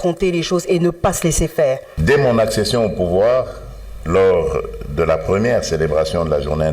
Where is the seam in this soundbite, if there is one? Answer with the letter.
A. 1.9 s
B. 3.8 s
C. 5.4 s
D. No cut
A